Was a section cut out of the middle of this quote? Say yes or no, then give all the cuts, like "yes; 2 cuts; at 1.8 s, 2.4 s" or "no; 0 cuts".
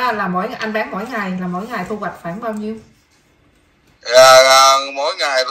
no; 0 cuts